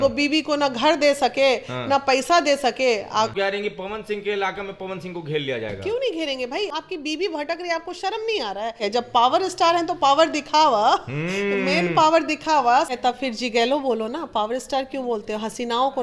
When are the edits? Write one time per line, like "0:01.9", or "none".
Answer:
0:03.3
0:06.7
0:08.9
0:12.9